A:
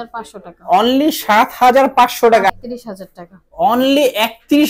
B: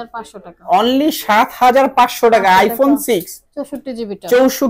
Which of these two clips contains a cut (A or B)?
A